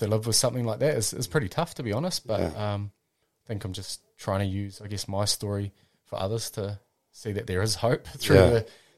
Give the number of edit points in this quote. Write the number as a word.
zero